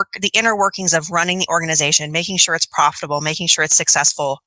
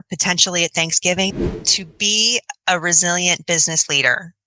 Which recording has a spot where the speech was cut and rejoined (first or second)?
second